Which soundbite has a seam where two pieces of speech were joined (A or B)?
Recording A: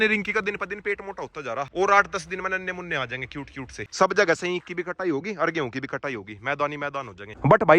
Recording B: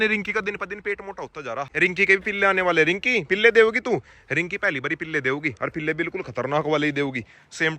A